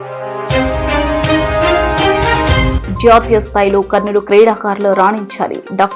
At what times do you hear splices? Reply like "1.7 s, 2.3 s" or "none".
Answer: 2.7 s